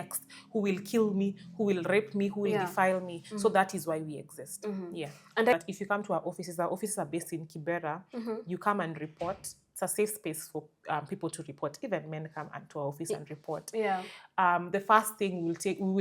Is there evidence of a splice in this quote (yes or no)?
yes